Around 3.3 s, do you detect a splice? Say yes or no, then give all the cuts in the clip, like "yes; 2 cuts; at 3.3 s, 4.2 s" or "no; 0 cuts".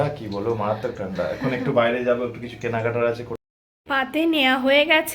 yes; 1 cut; at 3.3 s